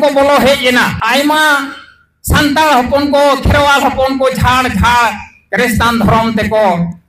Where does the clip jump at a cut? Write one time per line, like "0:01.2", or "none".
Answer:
0:01.0

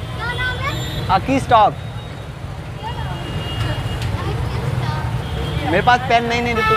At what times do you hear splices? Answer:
none

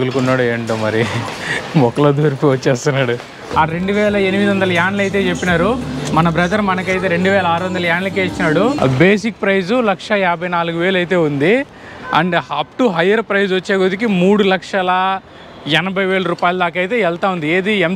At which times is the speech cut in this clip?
0:03.5
0:08.8

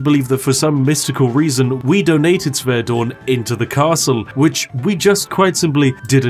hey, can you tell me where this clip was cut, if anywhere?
none

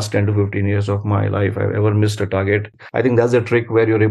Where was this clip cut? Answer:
0:02.8

